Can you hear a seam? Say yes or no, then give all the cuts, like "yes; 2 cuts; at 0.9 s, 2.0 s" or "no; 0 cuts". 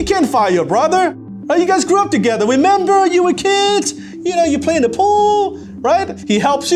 yes; 1 cut; at 1.3 s